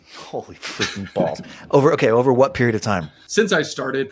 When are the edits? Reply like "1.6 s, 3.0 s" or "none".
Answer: none